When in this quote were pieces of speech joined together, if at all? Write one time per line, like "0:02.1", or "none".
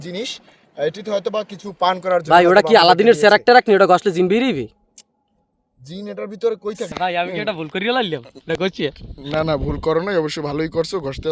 0:06.9